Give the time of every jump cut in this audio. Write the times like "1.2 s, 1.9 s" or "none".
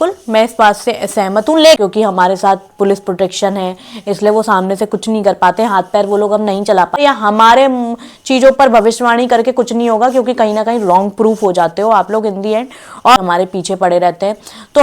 1.8 s, 7.0 s, 13.2 s